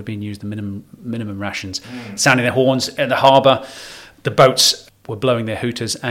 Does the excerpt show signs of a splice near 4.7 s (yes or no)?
yes